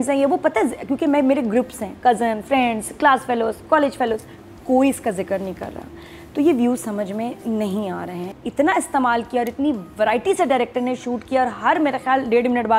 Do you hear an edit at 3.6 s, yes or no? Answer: no